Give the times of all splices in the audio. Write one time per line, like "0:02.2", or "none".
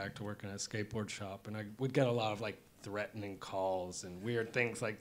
0:04.0